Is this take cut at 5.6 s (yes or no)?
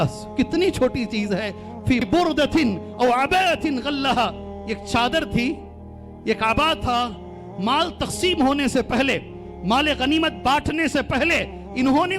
no